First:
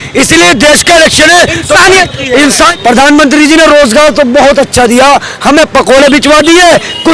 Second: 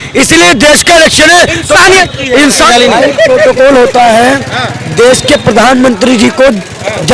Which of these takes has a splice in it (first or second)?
first